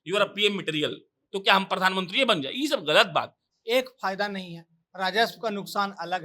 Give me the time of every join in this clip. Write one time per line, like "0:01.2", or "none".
0:03.4